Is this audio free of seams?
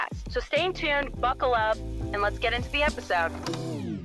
yes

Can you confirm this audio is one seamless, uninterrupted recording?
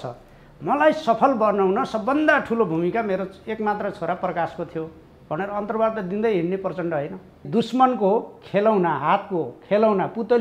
no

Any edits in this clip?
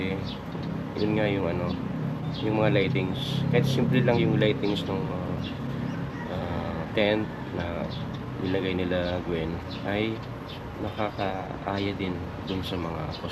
no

